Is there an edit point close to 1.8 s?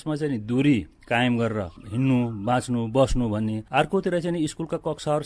yes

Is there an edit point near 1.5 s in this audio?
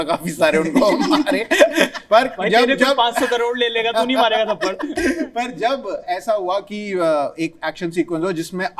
no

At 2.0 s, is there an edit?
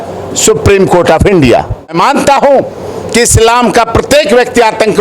yes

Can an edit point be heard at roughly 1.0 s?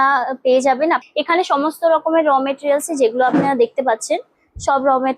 yes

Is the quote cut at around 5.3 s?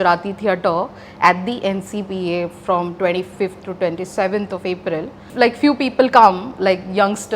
yes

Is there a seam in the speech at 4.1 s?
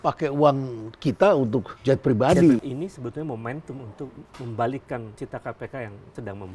no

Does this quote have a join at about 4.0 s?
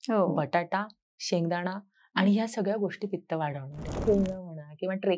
yes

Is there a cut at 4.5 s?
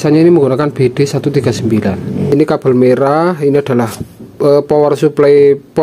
no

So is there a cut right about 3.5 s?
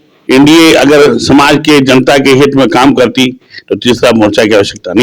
no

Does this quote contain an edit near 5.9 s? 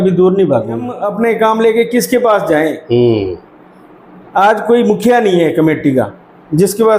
no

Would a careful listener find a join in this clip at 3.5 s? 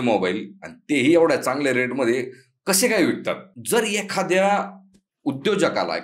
yes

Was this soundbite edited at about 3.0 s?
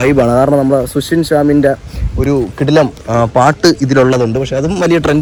no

